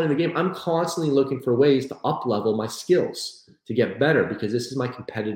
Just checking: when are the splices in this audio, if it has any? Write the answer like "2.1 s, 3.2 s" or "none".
none